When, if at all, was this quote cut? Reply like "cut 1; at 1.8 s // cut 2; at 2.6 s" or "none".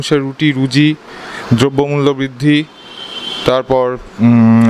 none